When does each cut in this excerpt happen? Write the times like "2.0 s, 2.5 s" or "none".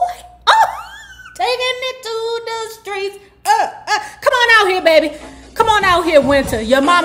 none